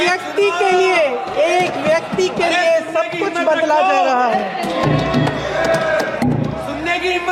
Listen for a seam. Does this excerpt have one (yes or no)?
no